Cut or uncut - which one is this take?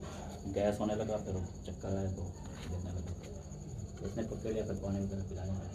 uncut